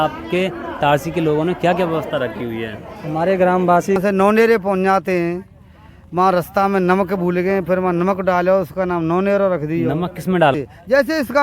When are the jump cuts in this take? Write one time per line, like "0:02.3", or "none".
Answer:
0:04.0
0:10.5